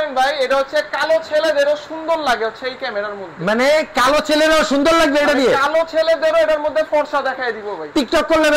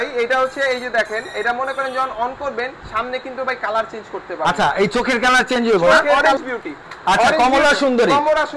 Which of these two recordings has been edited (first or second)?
second